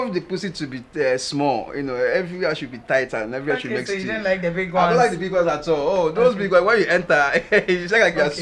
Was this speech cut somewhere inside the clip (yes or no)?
no